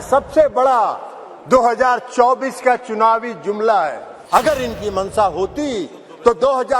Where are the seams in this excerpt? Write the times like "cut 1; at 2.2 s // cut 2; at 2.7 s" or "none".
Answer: cut 1; at 4.1 s